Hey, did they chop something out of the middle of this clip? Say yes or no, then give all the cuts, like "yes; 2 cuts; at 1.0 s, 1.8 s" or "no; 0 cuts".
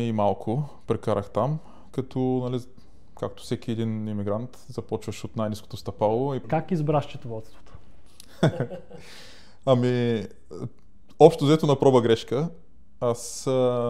yes; 1 cut; at 6.5 s